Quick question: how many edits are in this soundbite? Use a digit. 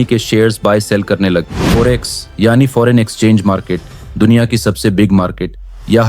1